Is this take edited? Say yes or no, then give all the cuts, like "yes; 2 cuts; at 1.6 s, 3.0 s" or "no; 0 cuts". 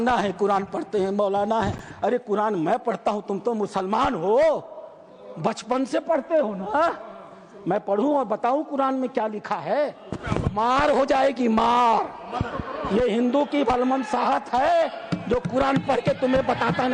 no; 0 cuts